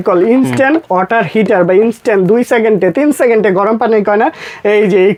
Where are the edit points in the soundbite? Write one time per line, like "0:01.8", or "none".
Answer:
none